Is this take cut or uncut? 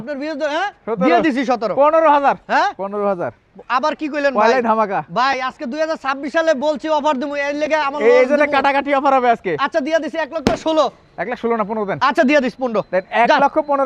uncut